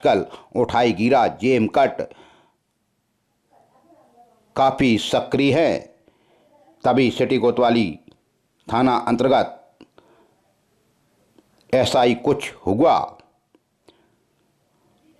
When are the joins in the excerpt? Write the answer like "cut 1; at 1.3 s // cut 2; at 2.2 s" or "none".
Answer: none